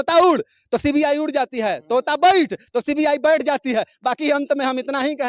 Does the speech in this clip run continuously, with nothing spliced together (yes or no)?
yes